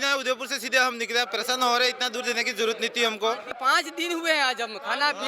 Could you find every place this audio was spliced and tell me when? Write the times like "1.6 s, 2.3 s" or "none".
3.6 s